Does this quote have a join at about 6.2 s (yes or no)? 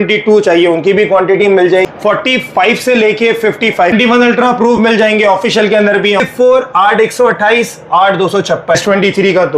yes